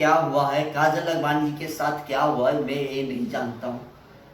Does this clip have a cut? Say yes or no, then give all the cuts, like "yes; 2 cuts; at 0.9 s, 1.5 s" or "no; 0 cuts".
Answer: no; 0 cuts